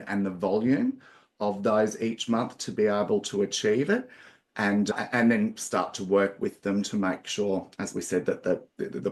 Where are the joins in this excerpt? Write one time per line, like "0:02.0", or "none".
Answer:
none

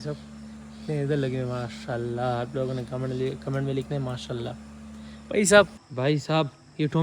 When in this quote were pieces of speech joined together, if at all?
0:05.8

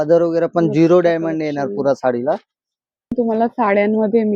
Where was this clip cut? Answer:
0:03.1

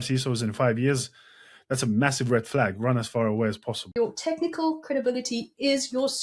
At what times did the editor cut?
0:03.8

